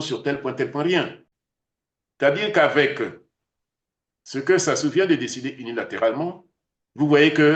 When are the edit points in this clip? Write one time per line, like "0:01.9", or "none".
0:01.2